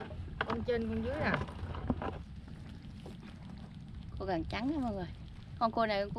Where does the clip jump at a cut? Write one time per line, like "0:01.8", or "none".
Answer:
0:02.3